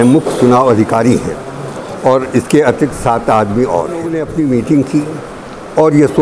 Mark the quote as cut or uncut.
cut